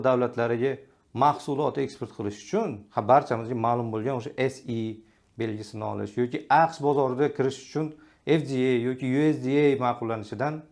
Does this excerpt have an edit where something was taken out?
no; 0 cuts

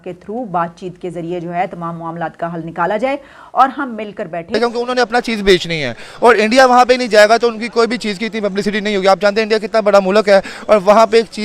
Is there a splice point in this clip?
yes; 1 cut; at 4.5 s

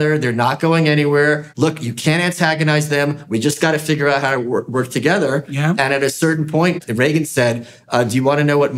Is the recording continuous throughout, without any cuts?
no; 2 cuts; at 1.5 s, 6.8 s

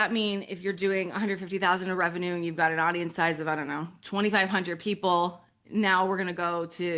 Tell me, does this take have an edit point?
no; 0 cuts

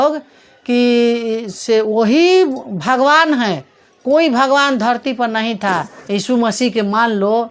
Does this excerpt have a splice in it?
yes; 1 cut; at 5.9 s

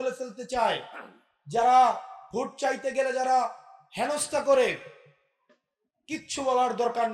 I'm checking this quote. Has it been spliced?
no; 0 cuts

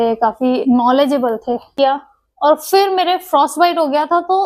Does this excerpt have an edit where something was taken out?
yes; 1 cut; at 1.7 s

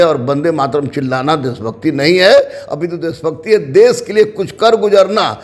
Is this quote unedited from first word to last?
yes; 0 cuts

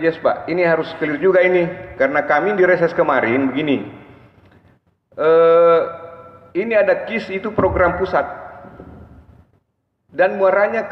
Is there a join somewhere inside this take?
no; 0 cuts

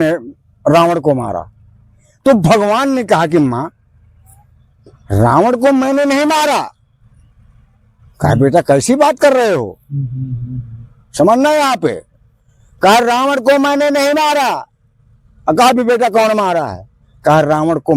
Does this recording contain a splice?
no; 0 cuts

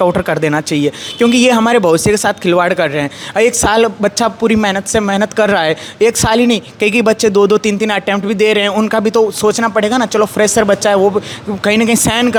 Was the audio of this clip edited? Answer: no; 0 cuts

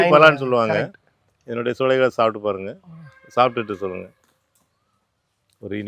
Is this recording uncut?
yes; 0 cuts

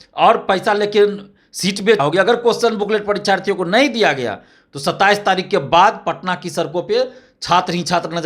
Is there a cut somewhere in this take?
yes; 1 cut; at 2.0 s

